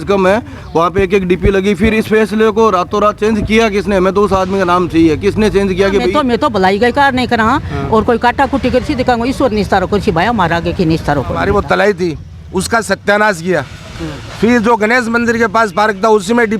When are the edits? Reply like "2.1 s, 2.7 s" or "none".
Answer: 6.1 s, 11.4 s